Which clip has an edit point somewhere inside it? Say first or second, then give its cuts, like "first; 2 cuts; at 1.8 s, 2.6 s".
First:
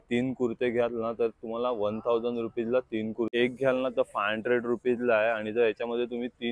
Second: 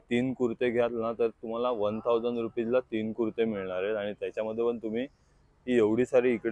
first; 1 cut; at 3.3 s